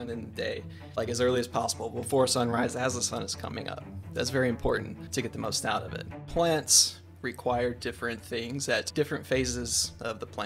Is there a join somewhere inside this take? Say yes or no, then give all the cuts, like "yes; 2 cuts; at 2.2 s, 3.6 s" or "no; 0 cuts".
yes; 3 cuts; at 5.0 s, 6.2 s, 8.9 s